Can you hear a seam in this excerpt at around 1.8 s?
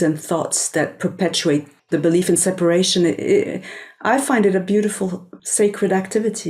yes; 2 cuts; at 1.8 s, 5.3 s

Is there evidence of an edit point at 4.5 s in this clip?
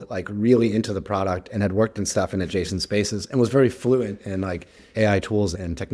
no; 0 cuts

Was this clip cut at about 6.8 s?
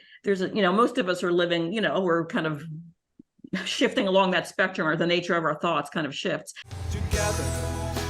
yes; 1 cut; at 6.8 s

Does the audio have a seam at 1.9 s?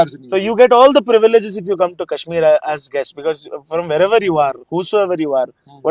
no; 0 cuts

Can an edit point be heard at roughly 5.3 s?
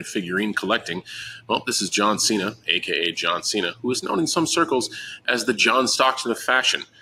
no; 0 cuts

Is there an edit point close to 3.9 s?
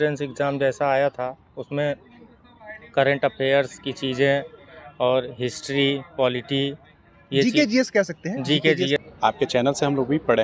no; 1 cut; at 9.0 s

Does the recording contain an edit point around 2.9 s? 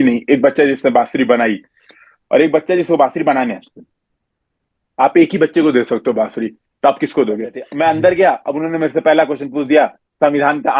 no; 1 cut; at 7.6 s

